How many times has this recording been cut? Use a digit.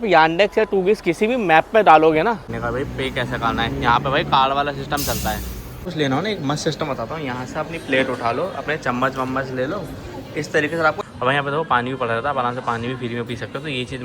3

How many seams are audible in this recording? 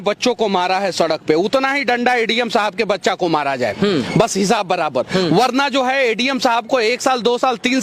0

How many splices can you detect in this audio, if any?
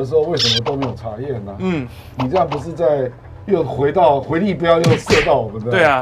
0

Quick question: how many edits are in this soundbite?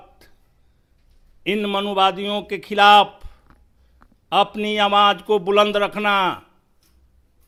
0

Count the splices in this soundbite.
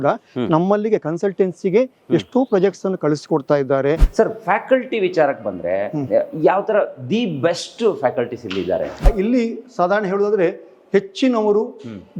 2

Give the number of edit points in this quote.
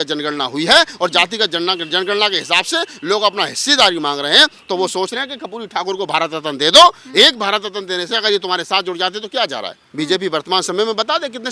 1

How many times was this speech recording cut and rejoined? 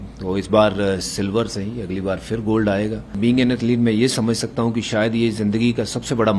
1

